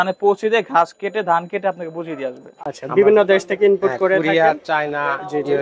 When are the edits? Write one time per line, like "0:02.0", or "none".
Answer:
0:02.5